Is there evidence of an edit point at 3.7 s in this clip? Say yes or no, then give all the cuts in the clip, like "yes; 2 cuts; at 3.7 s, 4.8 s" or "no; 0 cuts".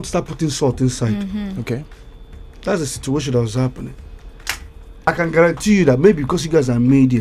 no; 1 cut; at 5.1 s